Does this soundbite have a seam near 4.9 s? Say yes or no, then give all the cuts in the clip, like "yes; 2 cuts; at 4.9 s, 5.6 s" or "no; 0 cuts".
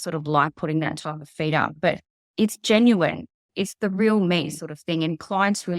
no; 2 cuts; at 2.1 s, 3.4 s